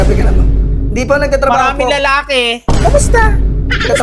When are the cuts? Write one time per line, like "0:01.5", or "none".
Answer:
none